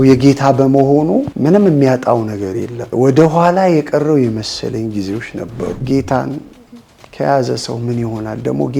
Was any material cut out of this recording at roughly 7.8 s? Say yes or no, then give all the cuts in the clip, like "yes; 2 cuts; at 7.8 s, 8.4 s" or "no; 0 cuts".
no; 3 cuts; at 1.3 s, 2.8 s, 5.8 s